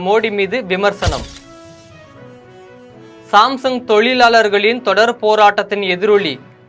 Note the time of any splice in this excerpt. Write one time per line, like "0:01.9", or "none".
0:01.3
0:03.2